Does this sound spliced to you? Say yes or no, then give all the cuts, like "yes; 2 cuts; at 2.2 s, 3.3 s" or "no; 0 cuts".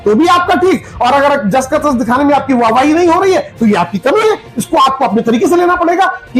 no; 0 cuts